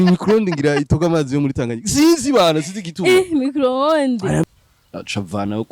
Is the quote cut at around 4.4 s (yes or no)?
yes